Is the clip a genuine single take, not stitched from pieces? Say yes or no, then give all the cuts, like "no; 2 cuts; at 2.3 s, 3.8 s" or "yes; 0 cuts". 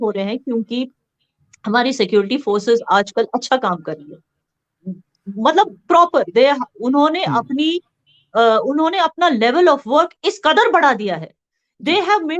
yes; 0 cuts